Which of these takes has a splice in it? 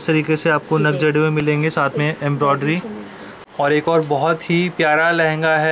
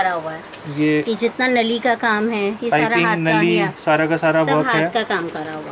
first; 1 cut; at 3.4 s

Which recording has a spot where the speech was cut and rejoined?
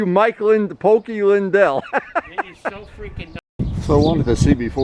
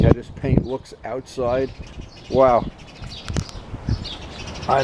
first; 1 cut; at 3.4 s

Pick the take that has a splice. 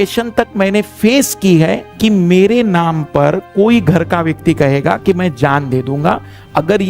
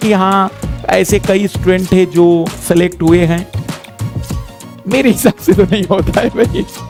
first; 1 cut; at 1.9 s

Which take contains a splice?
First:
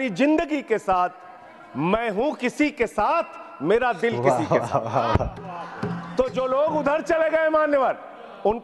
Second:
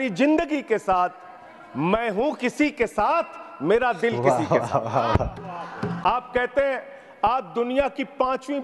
second; 1 cut; at 6.0 s

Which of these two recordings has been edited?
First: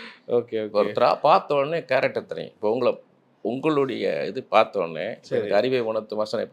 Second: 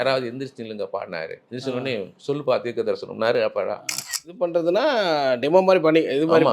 second; 1 cut; at 4.3 s

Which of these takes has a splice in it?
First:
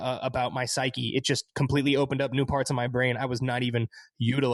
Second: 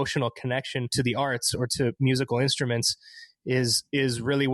second; 1 cut; at 0.9 s

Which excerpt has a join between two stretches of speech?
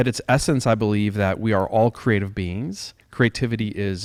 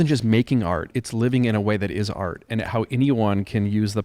second; 2 cuts; at 1.0 s, 2.7 s

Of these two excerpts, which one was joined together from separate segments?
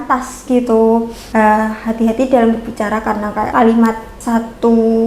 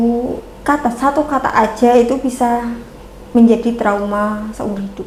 first; 3 cuts; at 1.2 s, 3.5 s, 4.1 s

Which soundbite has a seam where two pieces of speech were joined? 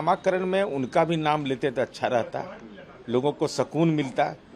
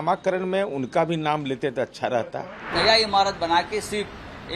second; 1 cut; at 2.7 s

